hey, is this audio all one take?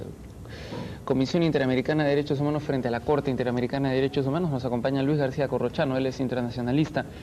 no; 1 cut; at 5.8 s

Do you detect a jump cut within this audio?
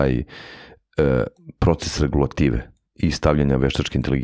no; 0 cuts

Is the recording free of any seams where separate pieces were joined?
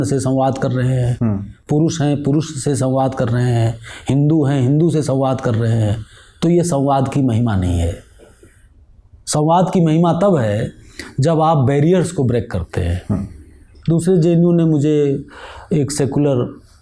yes; 0 cuts

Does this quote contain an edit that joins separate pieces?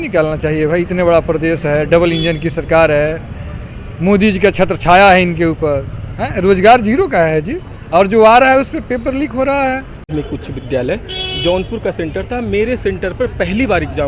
yes; 1 cut; at 10.1 s

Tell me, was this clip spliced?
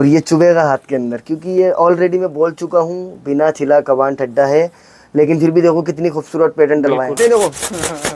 yes; 1 cut; at 7.2 s

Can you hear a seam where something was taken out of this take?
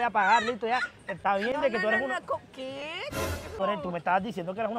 yes; 1 cut; at 3.6 s

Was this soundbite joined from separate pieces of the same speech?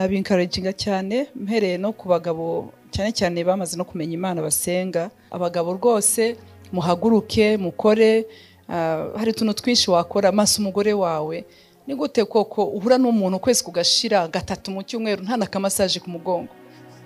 yes; 1 cut; at 5.3 s

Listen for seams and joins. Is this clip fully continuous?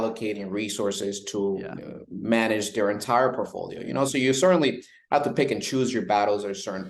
yes; 0 cuts

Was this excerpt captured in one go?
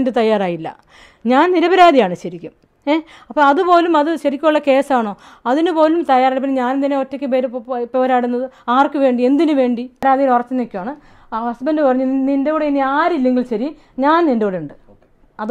no; 1 cut; at 10.0 s

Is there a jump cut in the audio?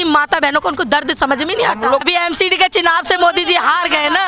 yes; 1 cut; at 2.0 s

